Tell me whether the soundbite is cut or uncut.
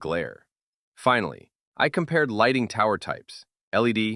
uncut